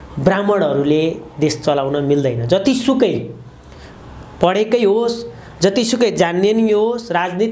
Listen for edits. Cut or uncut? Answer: uncut